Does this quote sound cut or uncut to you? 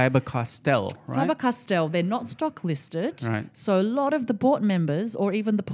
uncut